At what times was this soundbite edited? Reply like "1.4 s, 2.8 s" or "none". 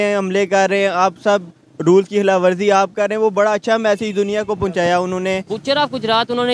5.5 s